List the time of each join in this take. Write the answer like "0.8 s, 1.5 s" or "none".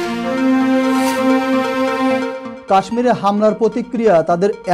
2.4 s